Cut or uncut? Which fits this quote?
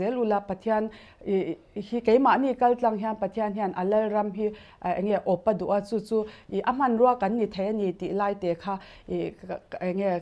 uncut